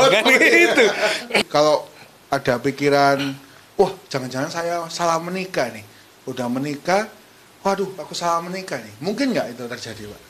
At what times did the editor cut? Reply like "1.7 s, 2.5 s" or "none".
1.4 s